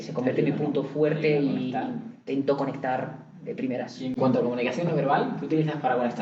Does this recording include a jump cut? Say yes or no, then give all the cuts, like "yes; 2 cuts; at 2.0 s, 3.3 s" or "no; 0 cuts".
no; 0 cuts